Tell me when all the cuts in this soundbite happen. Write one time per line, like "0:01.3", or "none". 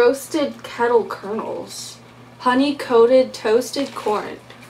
none